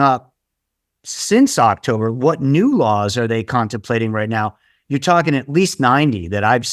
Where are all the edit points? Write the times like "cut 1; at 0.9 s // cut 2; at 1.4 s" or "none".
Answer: none